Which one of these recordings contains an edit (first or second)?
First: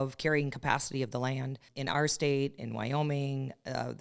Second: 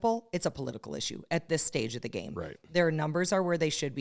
first